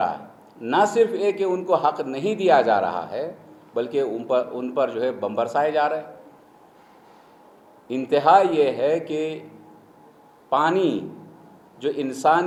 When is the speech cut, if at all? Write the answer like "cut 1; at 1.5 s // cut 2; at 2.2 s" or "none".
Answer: none